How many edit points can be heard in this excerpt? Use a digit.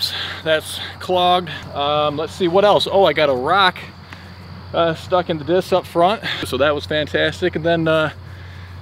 2